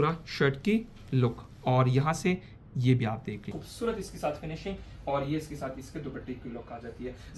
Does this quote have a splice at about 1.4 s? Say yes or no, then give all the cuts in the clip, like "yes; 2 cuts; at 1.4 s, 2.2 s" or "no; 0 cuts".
no; 1 cut; at 3.6 s